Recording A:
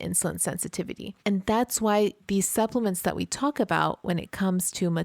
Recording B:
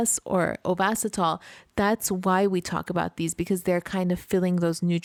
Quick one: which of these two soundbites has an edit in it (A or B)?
A